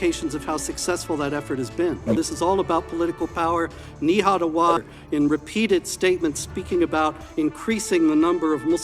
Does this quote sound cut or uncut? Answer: cut